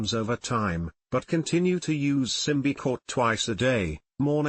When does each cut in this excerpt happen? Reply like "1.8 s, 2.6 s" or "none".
3.0 s